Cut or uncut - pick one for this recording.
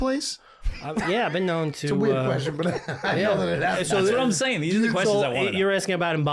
uncut